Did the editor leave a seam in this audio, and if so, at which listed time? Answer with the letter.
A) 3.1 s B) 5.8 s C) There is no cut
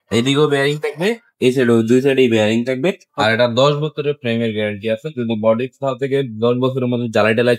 A